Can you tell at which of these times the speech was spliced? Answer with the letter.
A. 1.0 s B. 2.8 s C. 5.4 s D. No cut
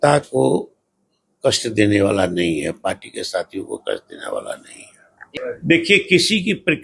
C